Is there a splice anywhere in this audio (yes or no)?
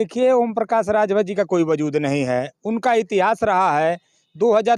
no